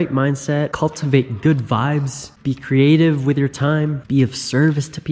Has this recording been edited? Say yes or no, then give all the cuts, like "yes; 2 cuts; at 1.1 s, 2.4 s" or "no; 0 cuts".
no; 0 cuts